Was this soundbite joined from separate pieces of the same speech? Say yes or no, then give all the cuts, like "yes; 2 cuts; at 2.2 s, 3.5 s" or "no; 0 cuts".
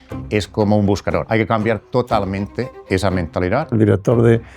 yes; 2 cuts; at 1.2 s, 3.7 s